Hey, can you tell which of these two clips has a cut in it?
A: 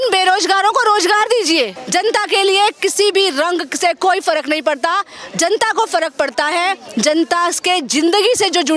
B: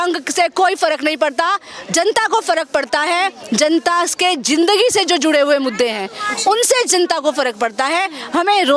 A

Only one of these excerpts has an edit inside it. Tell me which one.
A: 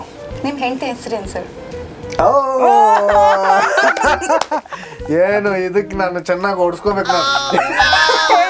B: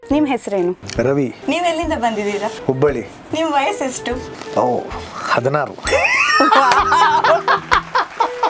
B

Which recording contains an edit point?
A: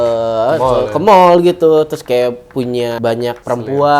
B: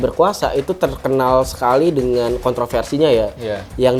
A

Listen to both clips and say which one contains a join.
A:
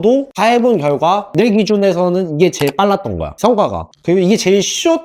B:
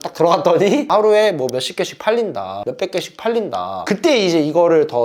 B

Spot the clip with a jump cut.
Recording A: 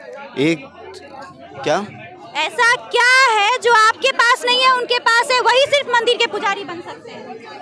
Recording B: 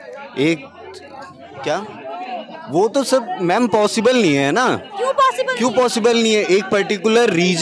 B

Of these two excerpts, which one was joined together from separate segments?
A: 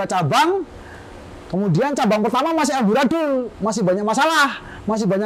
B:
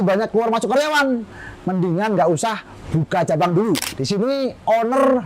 B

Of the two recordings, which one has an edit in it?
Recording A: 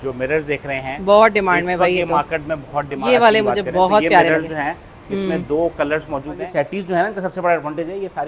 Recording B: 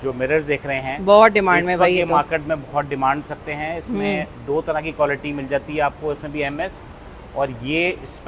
A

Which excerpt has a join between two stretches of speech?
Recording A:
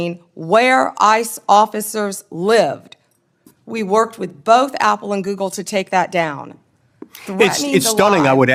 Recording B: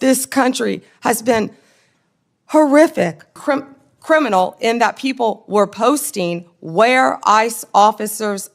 B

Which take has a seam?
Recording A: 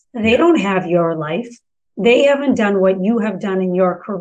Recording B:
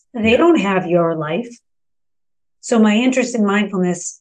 B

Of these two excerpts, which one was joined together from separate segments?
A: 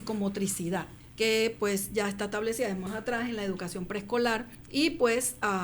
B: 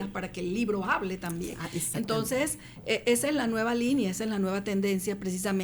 A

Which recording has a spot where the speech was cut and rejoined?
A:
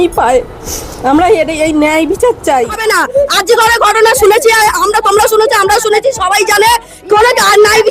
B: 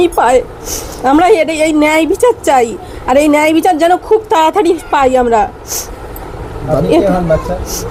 A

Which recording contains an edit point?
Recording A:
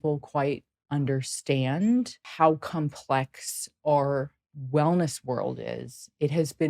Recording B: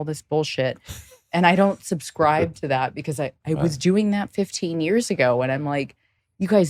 A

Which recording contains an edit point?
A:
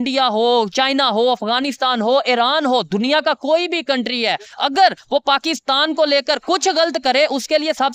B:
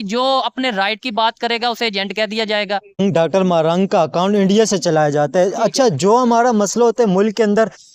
B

